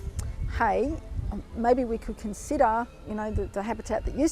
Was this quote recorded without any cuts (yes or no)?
no